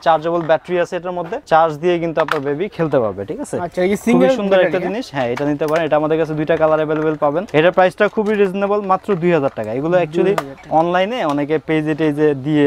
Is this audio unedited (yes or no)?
yes